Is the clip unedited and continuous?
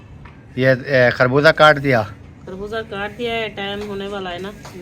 yes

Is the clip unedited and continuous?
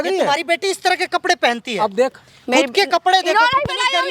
yes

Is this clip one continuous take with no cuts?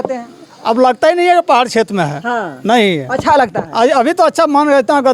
yes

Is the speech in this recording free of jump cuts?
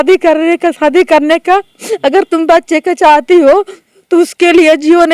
yes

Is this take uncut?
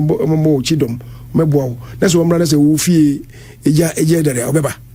yes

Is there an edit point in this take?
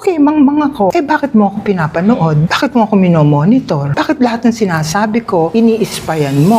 no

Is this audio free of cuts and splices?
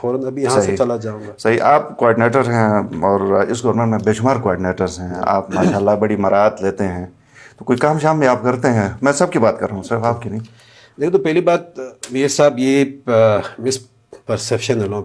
yes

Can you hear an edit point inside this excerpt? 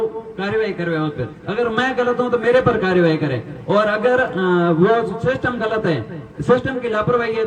no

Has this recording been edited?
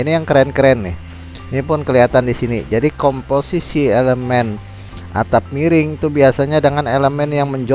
no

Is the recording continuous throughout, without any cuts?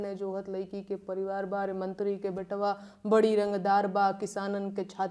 yes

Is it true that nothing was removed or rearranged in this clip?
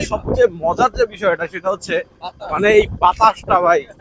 yes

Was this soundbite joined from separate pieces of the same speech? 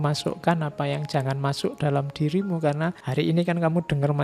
yes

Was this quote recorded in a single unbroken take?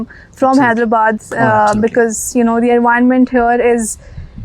yes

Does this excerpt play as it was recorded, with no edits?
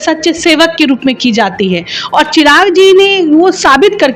yes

